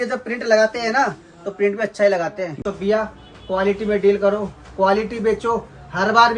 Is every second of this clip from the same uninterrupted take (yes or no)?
no